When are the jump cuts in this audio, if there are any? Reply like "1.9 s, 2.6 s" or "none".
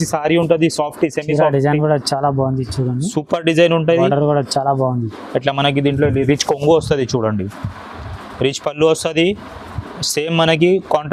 none